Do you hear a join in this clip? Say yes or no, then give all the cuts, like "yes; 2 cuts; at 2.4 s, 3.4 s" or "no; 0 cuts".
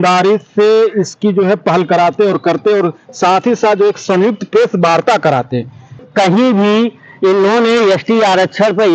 yes; 1 cut; at 6.1 s